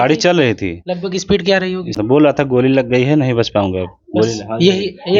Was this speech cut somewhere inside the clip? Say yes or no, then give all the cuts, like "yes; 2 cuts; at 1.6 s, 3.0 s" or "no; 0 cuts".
yes; 1 cut; at 2.0 s